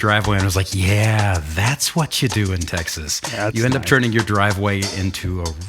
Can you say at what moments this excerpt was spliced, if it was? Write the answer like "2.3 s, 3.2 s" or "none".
none